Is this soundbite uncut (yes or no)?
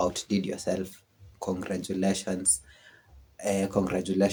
yes